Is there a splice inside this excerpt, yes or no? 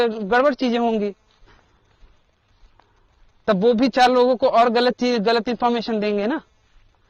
no